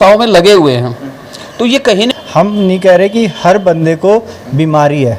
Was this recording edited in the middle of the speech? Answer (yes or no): yes